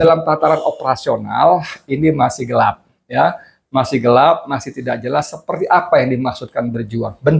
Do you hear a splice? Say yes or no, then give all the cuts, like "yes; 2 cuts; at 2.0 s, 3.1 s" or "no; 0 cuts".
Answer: no; 0 cuts